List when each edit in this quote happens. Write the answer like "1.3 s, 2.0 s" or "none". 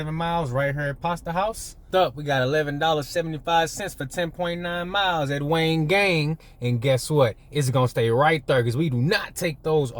1.7 s

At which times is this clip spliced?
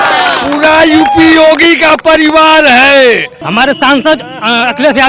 3.4 s

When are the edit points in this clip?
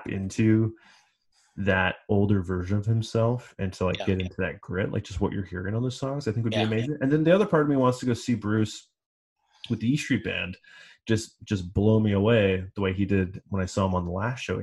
none

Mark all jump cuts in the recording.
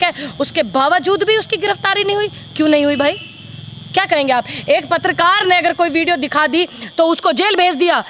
none

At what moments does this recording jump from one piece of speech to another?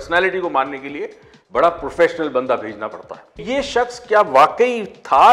3.4 s

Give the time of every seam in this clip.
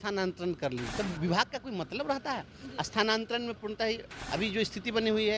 0.9 s, 4.1 s

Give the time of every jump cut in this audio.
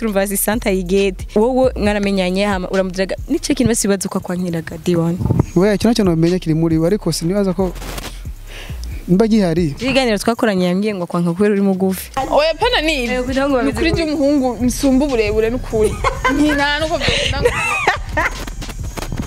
1.2 s, 12.1 s

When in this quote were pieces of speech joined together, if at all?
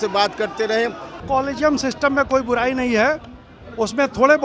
1.1 s

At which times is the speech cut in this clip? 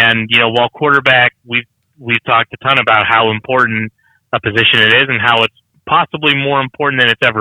5.7 s

